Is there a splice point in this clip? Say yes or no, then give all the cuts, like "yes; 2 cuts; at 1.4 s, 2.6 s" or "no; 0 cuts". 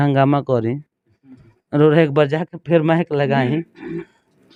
no; 0 cuts